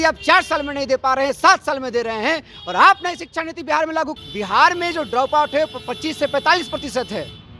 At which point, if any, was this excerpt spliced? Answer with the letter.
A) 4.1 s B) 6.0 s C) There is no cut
A